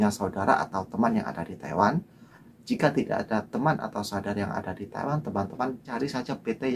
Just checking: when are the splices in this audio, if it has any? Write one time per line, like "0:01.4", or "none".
none